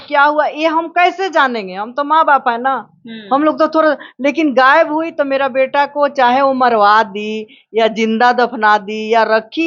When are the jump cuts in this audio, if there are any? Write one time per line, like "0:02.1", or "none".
none